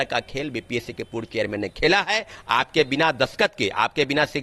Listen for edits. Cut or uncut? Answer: uncut